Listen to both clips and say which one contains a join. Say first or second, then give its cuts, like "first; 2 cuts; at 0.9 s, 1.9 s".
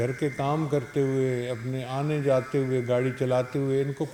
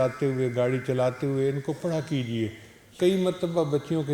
second; 1 cut; at 2.9 s